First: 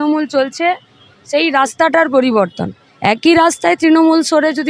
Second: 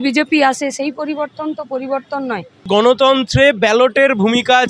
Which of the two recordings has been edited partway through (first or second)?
second